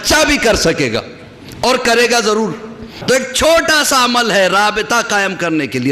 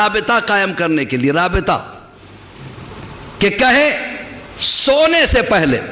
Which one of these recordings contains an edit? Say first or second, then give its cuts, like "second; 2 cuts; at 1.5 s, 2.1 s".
first; 1 cut; at 3.0 s